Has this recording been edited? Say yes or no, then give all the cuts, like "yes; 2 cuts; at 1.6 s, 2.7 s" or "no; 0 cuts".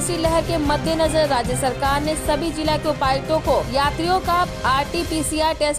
no; 0 cuts